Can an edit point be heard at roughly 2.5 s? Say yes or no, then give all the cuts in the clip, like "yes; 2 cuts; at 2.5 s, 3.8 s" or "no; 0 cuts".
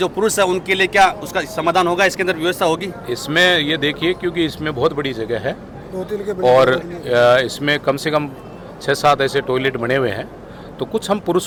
no; 0 cuts